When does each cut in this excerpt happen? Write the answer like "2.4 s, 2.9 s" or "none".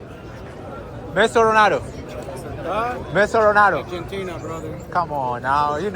none